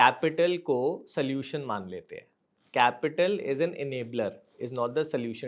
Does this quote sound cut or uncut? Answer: uncut